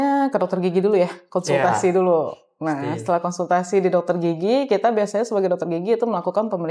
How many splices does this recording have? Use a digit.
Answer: 0